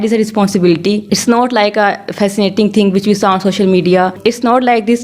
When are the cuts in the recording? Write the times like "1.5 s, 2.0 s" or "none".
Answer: 1.0 s, 4.1 s